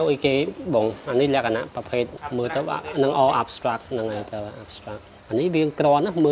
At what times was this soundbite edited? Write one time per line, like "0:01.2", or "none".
0:02.2
0:05.1